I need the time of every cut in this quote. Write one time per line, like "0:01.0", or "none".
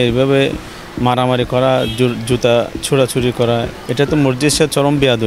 0:03.8